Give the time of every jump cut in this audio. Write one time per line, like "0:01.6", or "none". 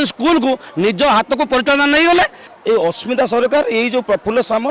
0:02.4